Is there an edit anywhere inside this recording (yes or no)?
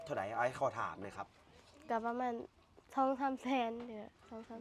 no